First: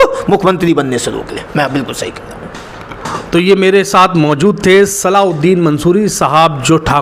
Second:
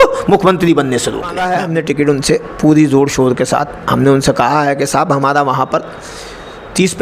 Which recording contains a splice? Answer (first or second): second